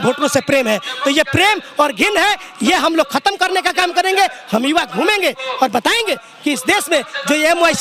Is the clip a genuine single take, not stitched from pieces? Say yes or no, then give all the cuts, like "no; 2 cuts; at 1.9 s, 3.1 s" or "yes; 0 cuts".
yes; 0 cuts